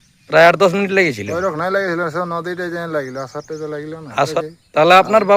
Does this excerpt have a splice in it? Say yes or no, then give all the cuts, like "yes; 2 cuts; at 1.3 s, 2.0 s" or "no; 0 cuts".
yes; 1 cut; at 4.3 s